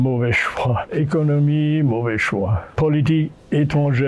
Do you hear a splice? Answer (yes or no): yes